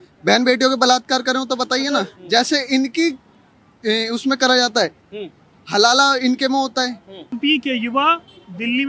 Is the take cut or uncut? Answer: cut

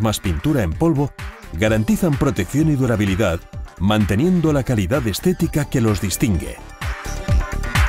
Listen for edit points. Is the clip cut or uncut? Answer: cut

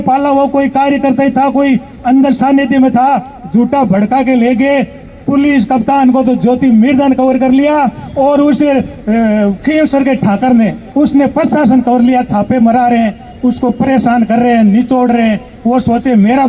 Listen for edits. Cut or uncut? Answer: uncut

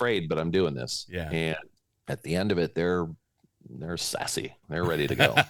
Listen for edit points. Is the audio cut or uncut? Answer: uncut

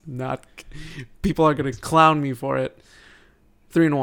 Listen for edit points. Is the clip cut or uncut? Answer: uncut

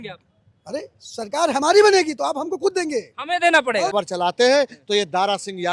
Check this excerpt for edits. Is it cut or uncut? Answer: cut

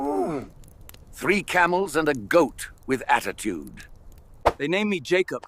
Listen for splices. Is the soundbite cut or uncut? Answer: cut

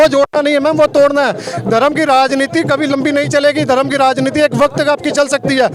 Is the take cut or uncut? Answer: uncut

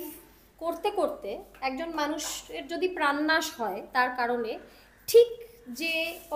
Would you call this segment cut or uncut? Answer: uncut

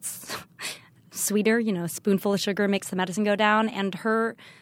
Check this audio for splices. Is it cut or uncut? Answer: cut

